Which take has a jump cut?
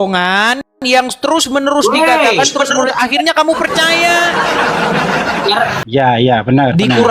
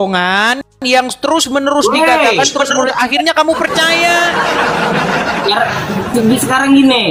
first; 1 cut; at 5.8 s

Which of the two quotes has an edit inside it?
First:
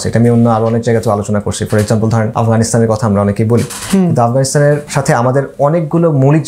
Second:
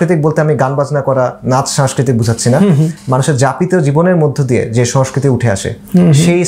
first; 2 cuts; at 2.3 s, 4.9 s

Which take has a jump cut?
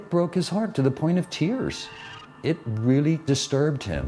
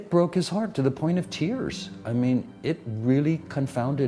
first; 2 cuts; at 2.2 s, 3.2 s

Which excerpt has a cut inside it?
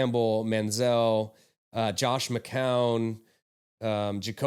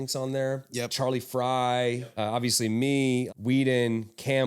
second; 3 cuts; at 0.9 s, 2.1 s, 3.3 s

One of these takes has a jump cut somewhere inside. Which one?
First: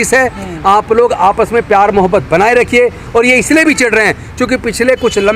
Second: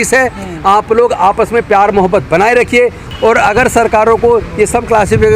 second; 1 cut; at 3.0 s

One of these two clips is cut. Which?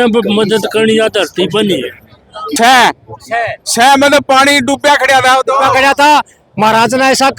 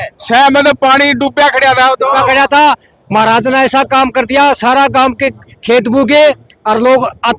first; 1 cut; at 2.4 s

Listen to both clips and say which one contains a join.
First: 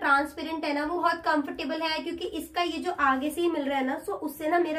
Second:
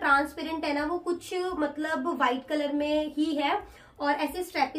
first; 1 cut; at 1.0 s

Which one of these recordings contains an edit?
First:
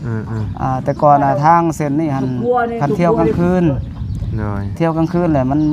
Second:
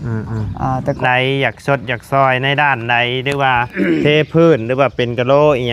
second; 1 cut; at 1.0 s

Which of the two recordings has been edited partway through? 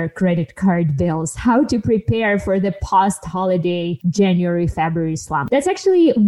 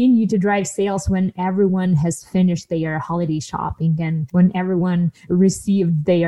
first; 2 cuts; at 4.0 s, 5.4 s

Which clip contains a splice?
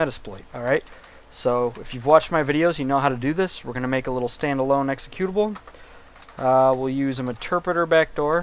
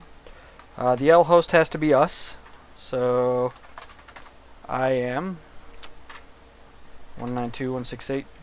second; 1 cut; at 1.1 s

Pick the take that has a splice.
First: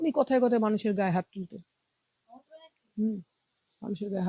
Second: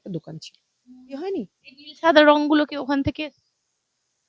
second; 1 cut; at 1.2 s

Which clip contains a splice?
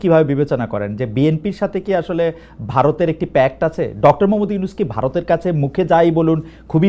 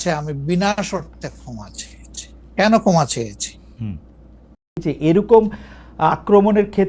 second; 1 cut; at 4.8 s

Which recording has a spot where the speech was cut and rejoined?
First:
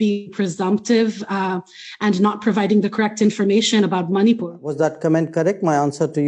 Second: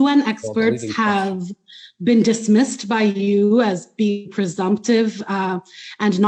first; 1 cut; at 4.6 s

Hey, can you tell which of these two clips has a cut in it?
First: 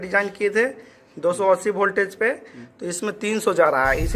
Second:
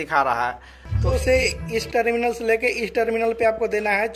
second; 1 cut; at 1.1 s

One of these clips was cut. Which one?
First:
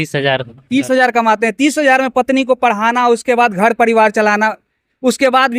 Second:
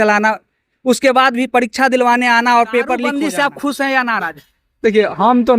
second; 1 cut; at 3.1 s

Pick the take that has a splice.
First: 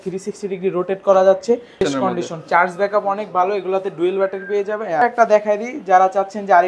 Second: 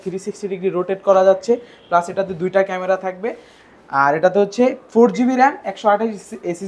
first; 2 cuts; at 1.8 s, 5.0 s

